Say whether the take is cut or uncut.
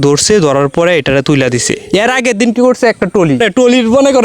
cut